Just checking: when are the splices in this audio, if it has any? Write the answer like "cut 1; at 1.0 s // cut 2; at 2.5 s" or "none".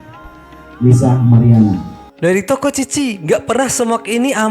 cut 1; at 2.0 s